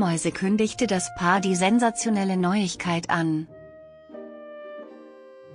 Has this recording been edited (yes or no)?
yes